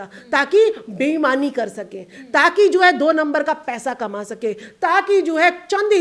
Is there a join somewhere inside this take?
no; 0 cuts

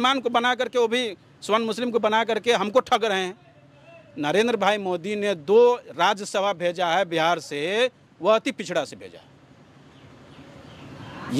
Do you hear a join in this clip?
no; 0 cuts

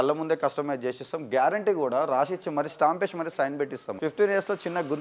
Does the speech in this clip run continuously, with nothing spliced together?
no; 1 cut; at 3.9 s

